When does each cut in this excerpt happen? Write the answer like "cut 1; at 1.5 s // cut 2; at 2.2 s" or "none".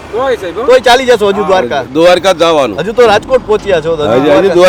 none